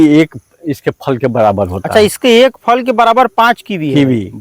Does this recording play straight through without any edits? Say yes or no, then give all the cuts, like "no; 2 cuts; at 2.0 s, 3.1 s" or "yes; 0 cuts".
yes; 0 cuts